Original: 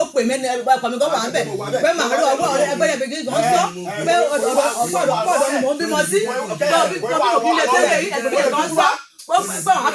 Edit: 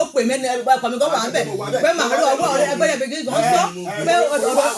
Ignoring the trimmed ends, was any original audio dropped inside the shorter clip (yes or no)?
no